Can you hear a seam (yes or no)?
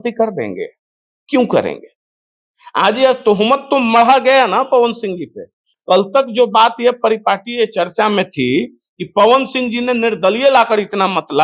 yes